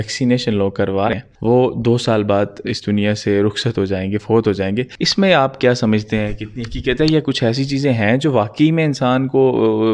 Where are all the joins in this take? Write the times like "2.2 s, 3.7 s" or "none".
1.1 s, 5.0 s